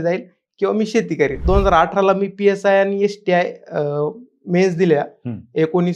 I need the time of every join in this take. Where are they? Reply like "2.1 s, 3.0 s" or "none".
1.4 s